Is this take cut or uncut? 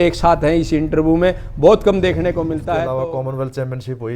cut